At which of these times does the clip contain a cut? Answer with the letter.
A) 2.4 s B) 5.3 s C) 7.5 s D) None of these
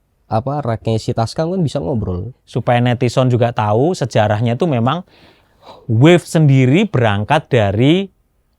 A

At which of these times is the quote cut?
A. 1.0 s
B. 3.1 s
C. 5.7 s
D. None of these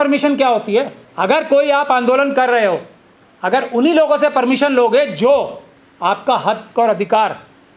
A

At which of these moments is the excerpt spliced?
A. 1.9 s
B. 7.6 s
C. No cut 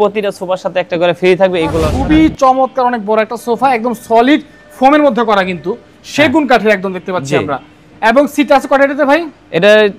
A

